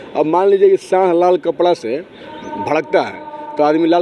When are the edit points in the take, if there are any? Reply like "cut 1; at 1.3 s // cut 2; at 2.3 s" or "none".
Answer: none